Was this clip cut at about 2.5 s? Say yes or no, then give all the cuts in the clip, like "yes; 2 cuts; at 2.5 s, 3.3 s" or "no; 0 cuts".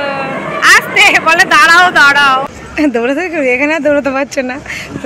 yes; 1 cut; at 2.5 s